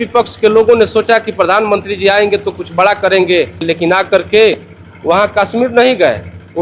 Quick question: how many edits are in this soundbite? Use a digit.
1